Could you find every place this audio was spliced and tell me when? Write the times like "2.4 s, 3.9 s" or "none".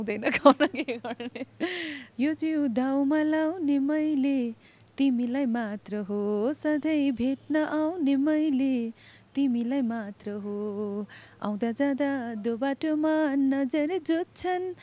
2.0 s